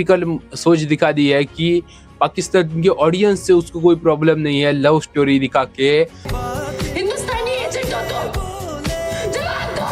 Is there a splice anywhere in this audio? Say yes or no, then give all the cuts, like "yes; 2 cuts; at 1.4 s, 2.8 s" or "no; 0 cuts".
no; 0 cuts